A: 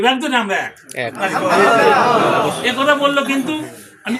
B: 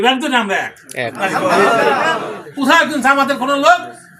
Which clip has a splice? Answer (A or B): B